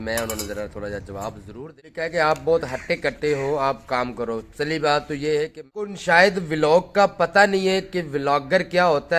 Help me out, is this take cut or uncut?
cut